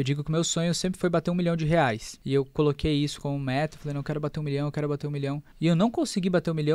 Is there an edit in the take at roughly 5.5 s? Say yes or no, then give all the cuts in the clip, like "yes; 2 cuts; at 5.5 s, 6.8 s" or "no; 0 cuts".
yes; 2 cuts; at 2.1 s, 5.5 s